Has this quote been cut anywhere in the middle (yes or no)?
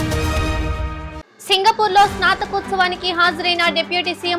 yes